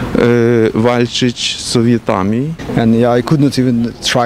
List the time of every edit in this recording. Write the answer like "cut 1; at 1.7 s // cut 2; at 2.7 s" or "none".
cut 1; at 2.6 s